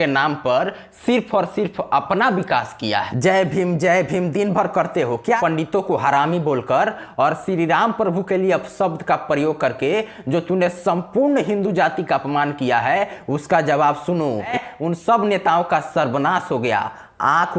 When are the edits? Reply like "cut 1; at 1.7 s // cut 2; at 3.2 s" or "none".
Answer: cut 1; at 3.1 s // cut 2; at 5.4 s // cut 3; at 14.5 s